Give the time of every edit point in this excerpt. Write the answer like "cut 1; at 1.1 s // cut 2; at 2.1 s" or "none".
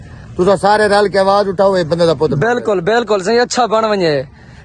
none